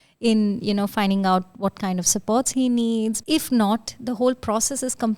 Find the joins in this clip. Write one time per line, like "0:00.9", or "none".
0:03.2